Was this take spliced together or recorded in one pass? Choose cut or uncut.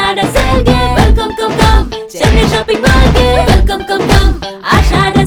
uncut